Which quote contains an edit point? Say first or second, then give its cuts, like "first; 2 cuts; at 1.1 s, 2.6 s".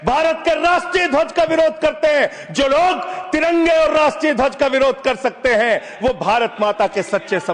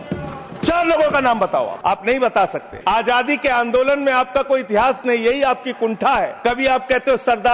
second; 3 cuts; at 1.7 s, 2.7 s, 6.3 s